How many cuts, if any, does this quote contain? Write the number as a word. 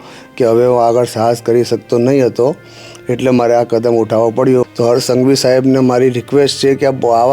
one